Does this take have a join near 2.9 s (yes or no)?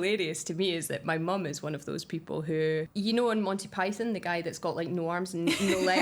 yes